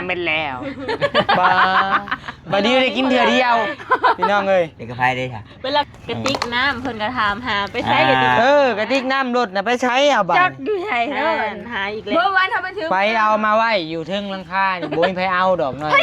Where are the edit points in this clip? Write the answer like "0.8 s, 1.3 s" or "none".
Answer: 5.9 s